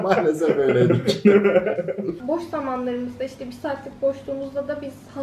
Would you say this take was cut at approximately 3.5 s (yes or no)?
no